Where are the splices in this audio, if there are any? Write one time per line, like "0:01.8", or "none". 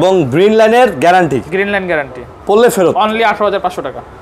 none